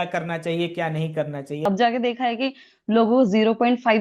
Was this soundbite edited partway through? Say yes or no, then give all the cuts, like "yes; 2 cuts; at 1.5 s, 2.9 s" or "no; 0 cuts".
yes; 1 cut; at 1.7 s